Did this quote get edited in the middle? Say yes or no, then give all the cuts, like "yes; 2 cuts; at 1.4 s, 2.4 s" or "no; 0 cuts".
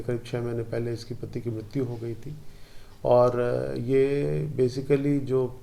no; 0 cuts